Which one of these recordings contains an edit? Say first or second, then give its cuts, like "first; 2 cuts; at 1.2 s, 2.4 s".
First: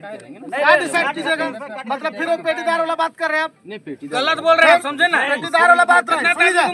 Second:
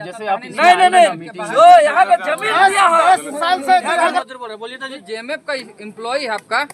second; 1 cut; at 4.2 s